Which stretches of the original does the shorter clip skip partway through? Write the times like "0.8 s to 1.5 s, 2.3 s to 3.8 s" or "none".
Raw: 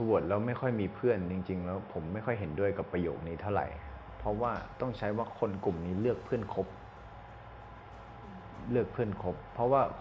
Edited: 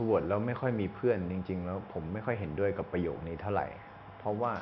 none